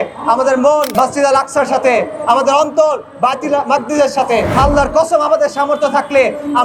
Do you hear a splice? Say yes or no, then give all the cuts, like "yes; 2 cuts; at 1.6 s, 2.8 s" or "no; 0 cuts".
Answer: yes; 2 cuts; at 0.9 s, 4.5 s